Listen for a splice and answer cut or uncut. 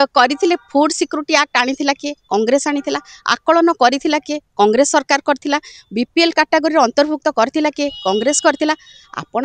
uncut